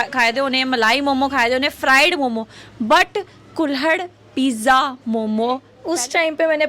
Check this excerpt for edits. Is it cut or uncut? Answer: cut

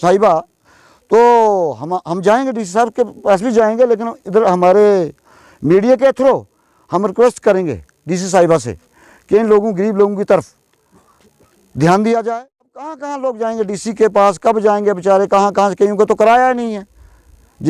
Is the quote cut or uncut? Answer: cut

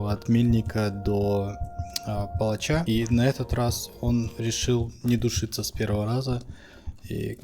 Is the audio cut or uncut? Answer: cut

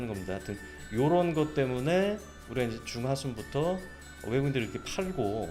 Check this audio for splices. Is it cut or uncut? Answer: uncut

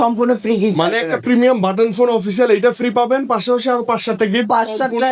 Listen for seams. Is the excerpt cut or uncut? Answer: uncut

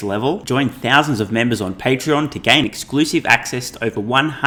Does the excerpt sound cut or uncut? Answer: uncut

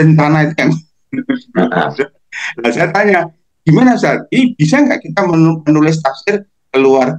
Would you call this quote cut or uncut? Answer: uncut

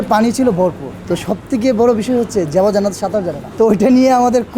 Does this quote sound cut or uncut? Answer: uncut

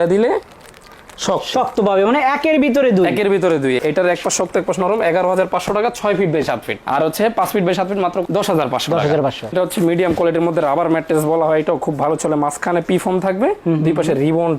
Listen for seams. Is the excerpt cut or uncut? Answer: cut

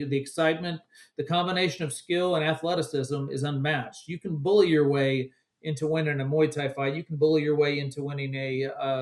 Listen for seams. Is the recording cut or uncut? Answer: uncut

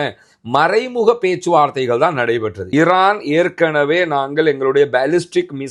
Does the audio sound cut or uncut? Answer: cut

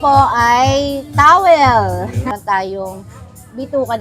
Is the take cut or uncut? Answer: cut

